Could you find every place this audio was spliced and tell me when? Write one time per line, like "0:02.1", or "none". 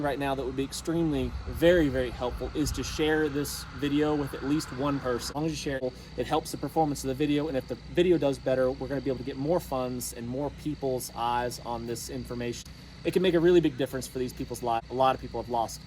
0:05.6
0:12.6
0:14.8

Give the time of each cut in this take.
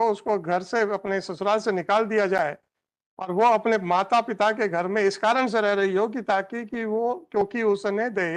none

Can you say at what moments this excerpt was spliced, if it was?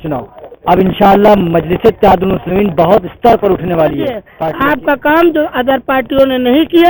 0:04.3

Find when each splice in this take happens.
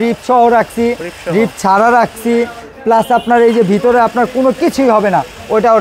none

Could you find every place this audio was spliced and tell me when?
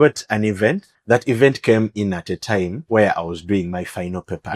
0:00.9
0:02.8

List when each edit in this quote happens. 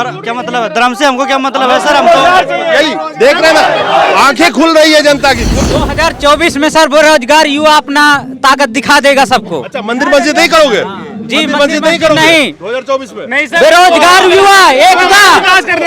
0:05.6

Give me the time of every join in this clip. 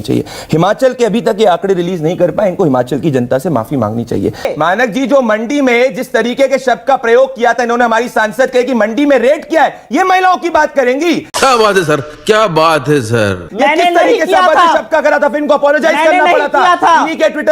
0:04.5

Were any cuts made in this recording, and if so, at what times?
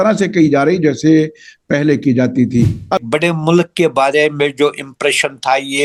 0:03.0

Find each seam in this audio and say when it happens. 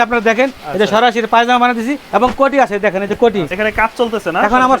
0:02.0
0:03.5

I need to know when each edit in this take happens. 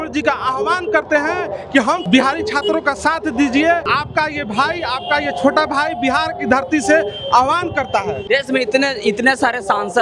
0:02.0
0:03.9
0:08.2

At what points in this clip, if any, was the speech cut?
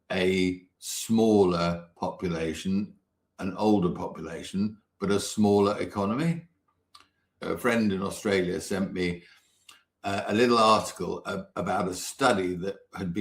0:07.3

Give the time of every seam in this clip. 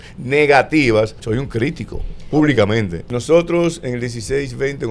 0:01.2
0:03.0

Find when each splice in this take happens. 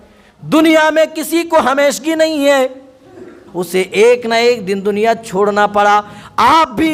0:03.4

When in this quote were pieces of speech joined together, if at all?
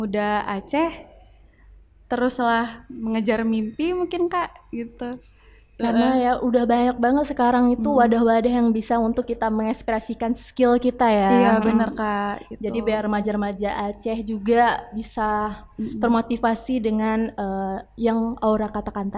none

